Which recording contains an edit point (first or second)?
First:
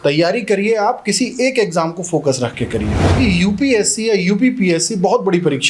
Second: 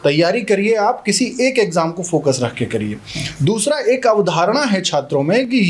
first